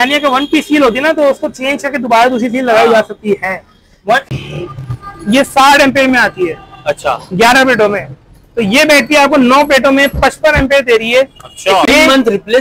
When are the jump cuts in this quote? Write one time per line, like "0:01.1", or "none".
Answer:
0:04.3
0:11.9